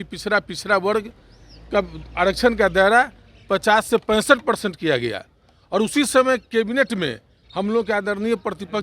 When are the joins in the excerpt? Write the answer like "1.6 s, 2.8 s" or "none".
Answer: none